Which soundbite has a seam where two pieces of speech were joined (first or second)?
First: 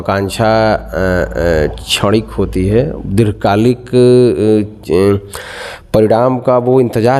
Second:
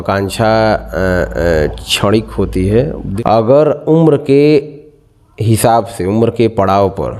second